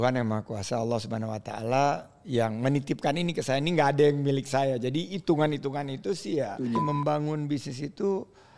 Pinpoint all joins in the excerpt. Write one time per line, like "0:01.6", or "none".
0:06.8